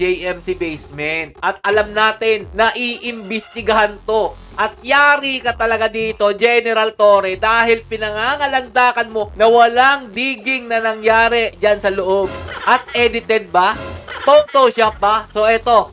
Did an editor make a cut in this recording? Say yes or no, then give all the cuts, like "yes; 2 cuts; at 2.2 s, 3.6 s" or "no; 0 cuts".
no; 0 cuts